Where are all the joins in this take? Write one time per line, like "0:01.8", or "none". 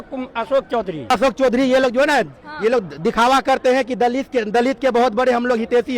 0:01.1